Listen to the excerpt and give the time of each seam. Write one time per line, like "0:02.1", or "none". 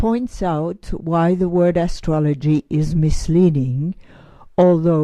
0:02.9

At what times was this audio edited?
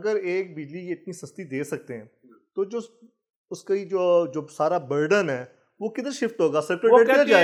none

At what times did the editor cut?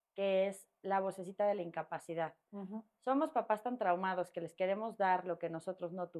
none

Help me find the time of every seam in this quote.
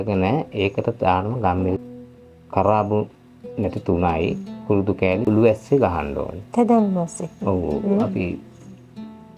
0:01.9
0:05.2

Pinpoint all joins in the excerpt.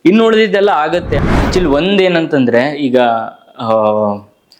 0:01.1

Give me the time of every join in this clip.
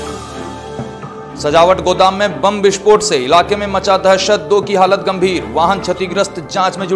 none

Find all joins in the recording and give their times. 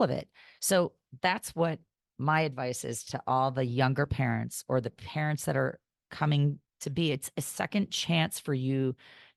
none

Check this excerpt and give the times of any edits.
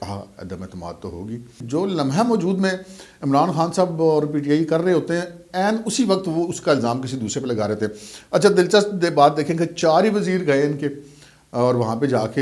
0:01.6

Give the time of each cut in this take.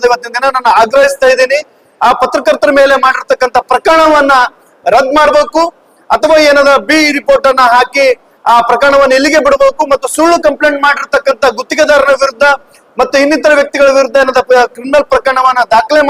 none

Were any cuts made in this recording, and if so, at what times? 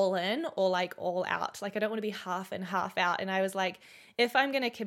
none

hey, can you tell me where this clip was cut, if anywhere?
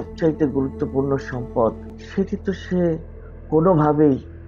0:01.9

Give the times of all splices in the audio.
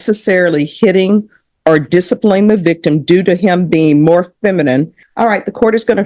0:05.0

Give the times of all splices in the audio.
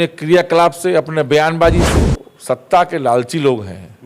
0:01.9

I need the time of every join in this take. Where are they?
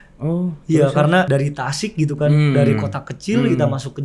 0:01.3

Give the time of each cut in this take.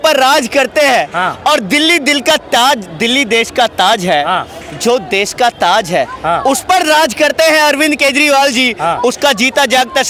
none

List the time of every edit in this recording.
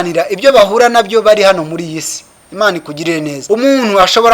0:03.3

